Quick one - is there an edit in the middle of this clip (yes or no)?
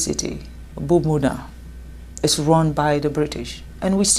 no